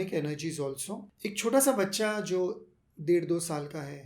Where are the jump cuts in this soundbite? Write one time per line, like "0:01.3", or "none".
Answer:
0:01.0